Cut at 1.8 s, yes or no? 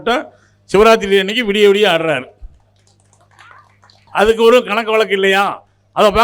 no